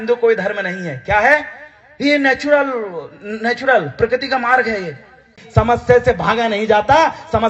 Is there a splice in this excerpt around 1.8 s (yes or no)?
no